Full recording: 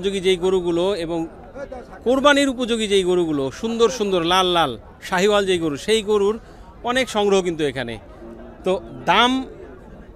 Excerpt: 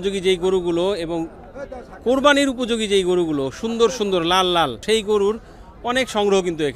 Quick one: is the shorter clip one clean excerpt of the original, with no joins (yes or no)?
no